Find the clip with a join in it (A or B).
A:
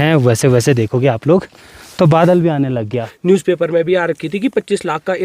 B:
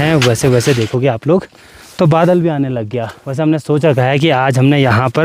A